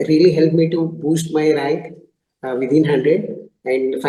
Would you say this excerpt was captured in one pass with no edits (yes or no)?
yes